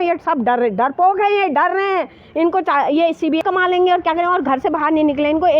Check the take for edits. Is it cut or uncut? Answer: cut